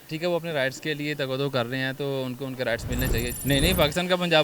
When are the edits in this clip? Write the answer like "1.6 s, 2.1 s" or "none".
3.3 s